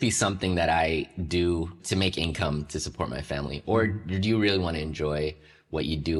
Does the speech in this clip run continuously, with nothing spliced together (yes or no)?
yes